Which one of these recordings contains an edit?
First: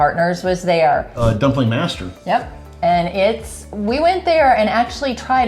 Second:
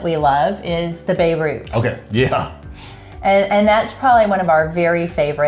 first; 1 cut; at 1.1 s

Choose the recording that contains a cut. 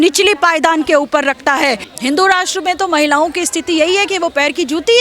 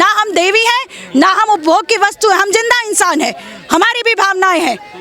first; 1 cut; at 1.9 s

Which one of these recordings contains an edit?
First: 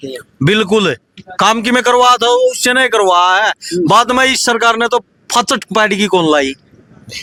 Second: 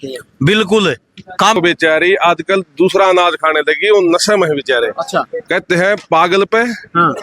second; 1 cut; at 1.6 s

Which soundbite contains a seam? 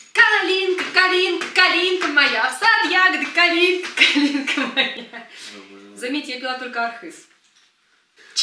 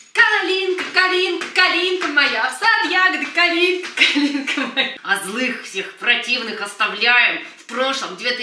second; 1 cut; at 5.0 s

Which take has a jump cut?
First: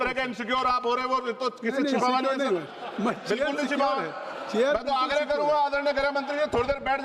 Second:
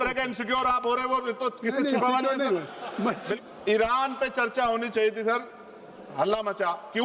second; 1 cut; at 3.3 s

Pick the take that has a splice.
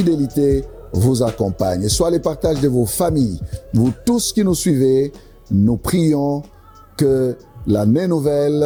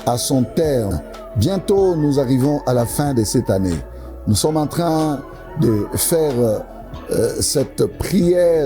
second; 1 cut; at 0.9 s

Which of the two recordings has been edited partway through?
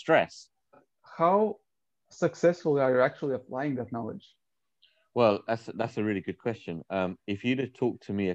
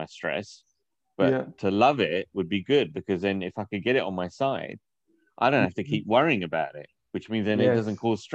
first; 1 cut; at 0.9 s

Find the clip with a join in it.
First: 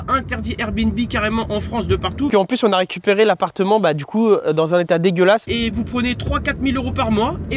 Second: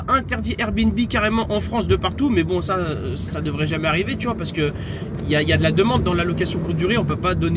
first; 2 cuts; at 2.3 s, 5.5 s

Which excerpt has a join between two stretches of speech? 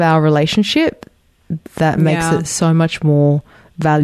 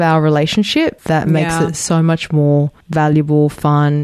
second; 2 cuts; at 1.0 s, 2.8 s

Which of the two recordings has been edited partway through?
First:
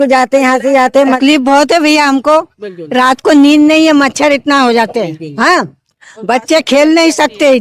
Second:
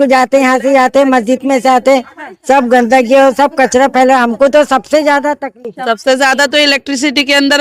first; 1 cut; at 1.2 s

